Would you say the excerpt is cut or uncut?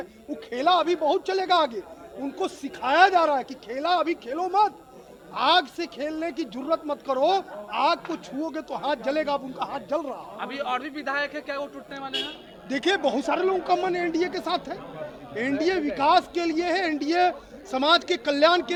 uncut